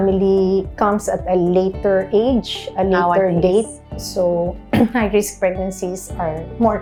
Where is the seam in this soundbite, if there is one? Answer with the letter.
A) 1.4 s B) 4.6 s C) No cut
C